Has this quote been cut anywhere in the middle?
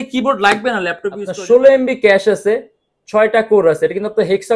yes; 1 cut; at 1.2 s

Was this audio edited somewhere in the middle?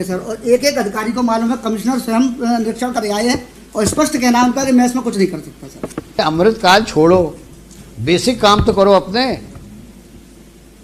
yes; 1 cut; at 6.2 s

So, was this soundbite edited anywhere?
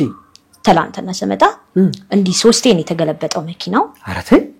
no; 0 cuts

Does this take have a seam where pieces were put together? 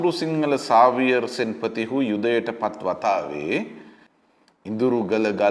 no; 0 cuts

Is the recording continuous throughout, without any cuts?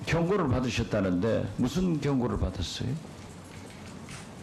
yes; 0 cuts

